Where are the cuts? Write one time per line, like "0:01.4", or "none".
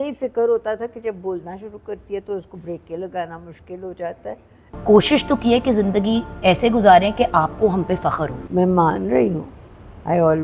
0:04.7
0:08.4